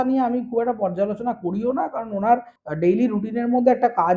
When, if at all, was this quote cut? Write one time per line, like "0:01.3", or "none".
0:02.6